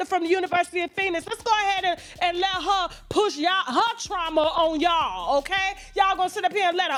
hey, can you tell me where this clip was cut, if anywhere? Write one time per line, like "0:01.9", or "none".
none